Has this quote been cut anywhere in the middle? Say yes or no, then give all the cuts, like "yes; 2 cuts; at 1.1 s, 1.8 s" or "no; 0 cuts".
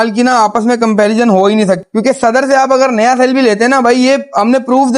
yes; 1 cut; at 1.8 s